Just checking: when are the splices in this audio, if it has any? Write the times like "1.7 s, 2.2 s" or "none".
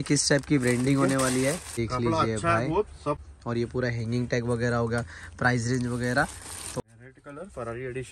1.8 s, 3.2 s, 6.8 s